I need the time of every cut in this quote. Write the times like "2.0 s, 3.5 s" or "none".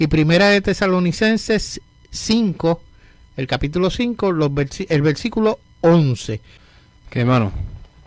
0.9 s